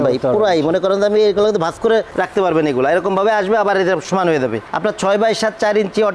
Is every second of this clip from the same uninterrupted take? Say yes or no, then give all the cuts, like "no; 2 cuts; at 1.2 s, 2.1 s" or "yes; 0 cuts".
no; 1 cut; at 4.7 s